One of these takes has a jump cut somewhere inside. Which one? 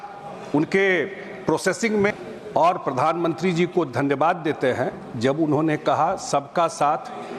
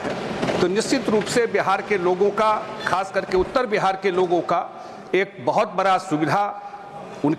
first; 1 cut; at 2.1 s

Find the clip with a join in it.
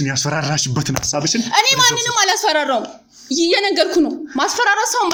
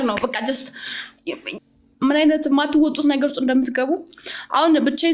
second; 1 cut; at 1.8 s

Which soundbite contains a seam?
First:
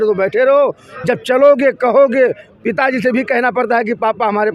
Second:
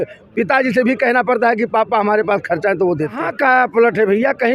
second; 1 cut; at 3.2 s

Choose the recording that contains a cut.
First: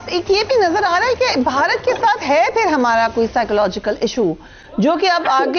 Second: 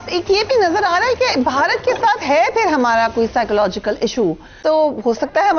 second; 1 cut; at 4.6 s

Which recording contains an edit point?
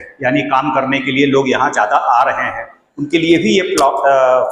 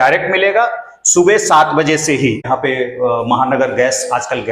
second; 1 cut; at 2.4 s

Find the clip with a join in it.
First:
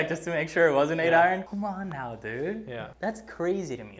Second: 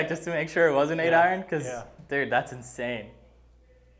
first; 2 cuts; at 1.4 s, 2.8 s

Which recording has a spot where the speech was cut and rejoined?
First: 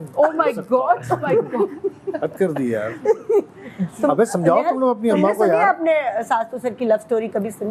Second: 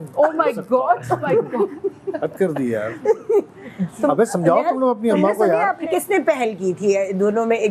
second; 1 cut; at 5.8 s

